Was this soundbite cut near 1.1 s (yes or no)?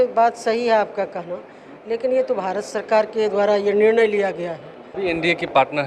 no